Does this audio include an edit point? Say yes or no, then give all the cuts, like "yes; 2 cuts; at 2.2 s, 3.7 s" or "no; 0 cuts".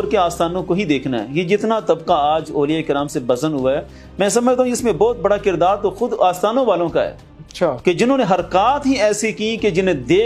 no; 0 cuts